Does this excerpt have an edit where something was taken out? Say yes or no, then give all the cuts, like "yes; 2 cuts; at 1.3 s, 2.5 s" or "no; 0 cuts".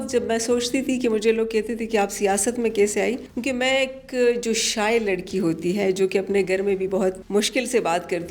yes; 2 cuts; at 3.3 s, 7.2 s